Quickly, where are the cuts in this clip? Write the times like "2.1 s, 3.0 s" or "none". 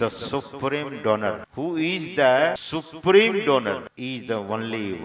1.5 s, 2.6 s, 3.9 s